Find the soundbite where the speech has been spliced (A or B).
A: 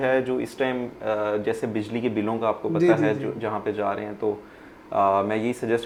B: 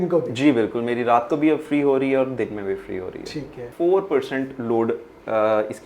B